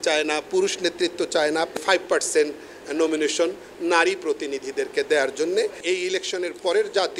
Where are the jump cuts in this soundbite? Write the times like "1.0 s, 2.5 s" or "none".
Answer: 1.8 s, 5.8 s